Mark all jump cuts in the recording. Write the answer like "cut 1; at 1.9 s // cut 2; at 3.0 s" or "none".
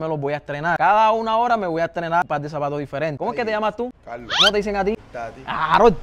none